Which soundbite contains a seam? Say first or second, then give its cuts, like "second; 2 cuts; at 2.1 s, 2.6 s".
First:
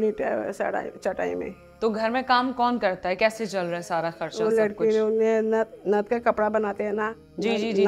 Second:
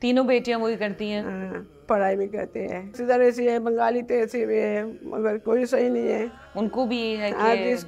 second; 2 cuts; at 3.0 s, 6.4 s